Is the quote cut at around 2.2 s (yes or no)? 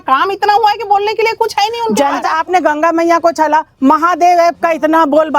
yes